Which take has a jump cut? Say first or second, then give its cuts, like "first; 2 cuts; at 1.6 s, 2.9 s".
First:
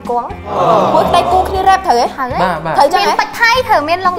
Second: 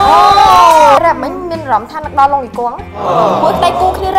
second; 1 cut; at 1.0 s